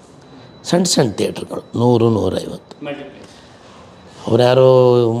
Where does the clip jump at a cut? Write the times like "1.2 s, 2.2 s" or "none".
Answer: none